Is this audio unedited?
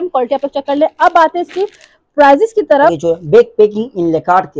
no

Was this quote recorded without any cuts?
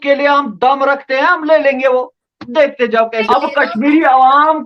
no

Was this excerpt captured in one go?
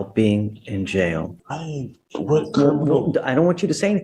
no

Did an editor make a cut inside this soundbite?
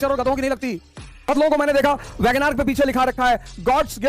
yes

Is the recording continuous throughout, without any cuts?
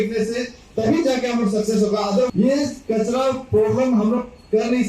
no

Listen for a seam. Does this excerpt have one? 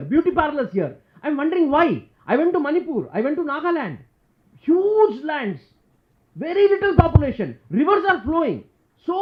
no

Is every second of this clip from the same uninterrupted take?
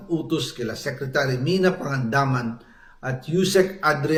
yes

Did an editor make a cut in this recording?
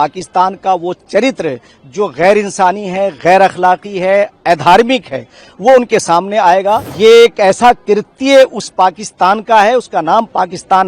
yes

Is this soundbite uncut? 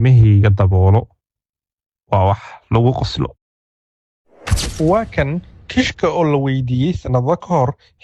yes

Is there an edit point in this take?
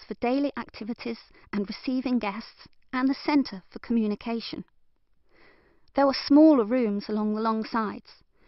yes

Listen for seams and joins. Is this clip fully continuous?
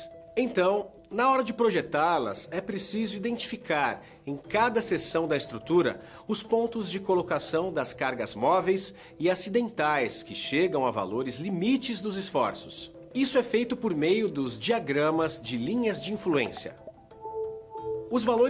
yes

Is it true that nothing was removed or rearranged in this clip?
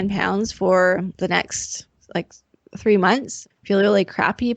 no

